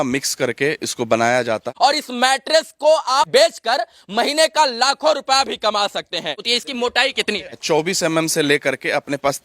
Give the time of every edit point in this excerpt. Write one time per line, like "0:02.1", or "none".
0:01.7
0:03.3
0:06.5
0:07.5

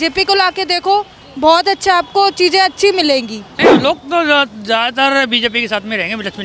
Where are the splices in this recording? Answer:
0:03.4

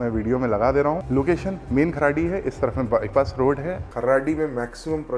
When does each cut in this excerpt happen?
0:01.0
0:03.9

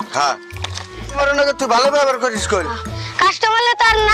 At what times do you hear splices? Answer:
0:00.9

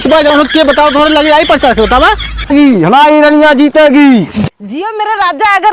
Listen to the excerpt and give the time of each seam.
0:02.3

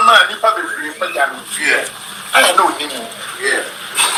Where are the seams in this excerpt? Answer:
none

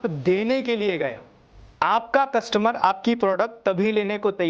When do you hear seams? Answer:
0:01.6

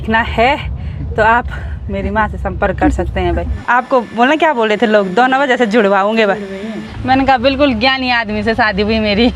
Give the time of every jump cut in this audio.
0:03.5
0:06.8

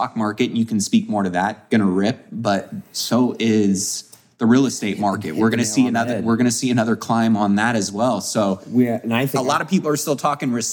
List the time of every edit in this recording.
none

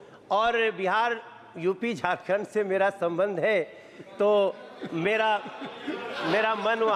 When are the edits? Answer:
none

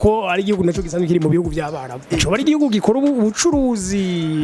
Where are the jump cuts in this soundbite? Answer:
0:02.1

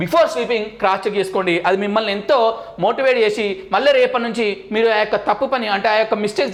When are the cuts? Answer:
none

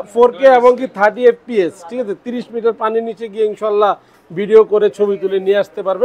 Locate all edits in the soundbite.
none

